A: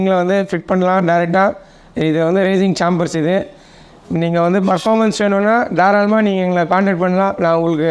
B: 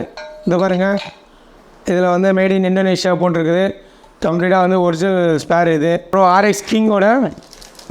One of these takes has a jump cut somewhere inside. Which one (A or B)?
B